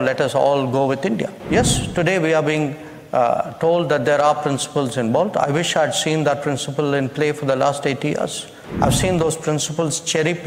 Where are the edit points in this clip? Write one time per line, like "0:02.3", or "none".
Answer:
0:01.4